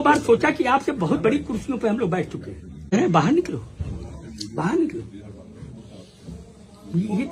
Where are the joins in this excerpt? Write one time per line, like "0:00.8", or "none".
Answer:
0:02.9